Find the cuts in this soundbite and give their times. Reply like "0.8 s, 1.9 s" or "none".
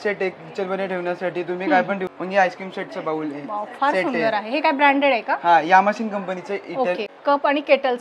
2.4 s, 7.1 s